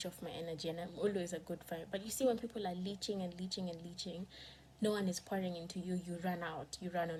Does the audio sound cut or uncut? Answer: uncut